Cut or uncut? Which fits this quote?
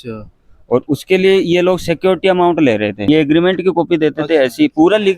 cut